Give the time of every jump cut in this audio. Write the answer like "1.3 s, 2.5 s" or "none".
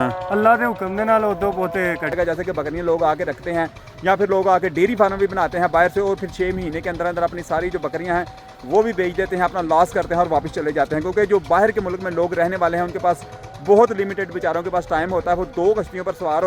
2.1 s